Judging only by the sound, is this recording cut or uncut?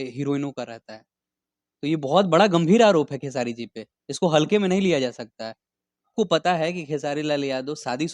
cut